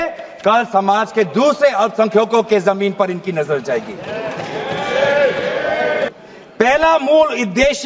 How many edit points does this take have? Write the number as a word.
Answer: one